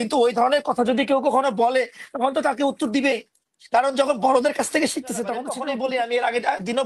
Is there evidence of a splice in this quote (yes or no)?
yes